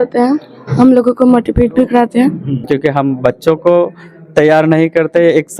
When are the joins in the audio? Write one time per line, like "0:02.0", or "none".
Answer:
0:02.6